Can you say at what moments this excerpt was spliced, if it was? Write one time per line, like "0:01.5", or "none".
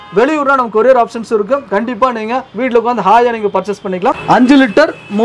0:04.2